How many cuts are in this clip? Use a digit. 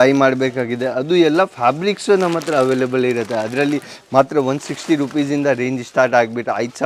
0